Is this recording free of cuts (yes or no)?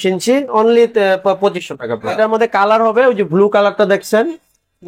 no